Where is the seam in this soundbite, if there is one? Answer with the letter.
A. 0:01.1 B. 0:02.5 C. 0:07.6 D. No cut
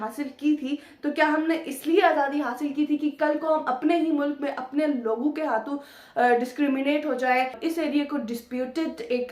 C